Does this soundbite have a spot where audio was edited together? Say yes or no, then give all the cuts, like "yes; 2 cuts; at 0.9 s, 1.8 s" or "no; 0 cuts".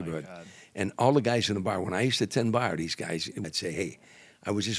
yes; 1 cut; at 3.4 s